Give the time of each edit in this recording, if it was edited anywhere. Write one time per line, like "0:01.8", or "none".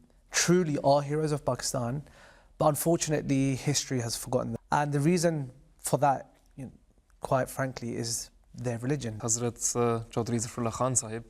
0:04.5
0:09.1